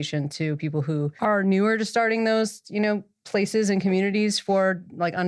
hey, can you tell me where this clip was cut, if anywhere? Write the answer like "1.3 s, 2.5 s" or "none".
1.1 s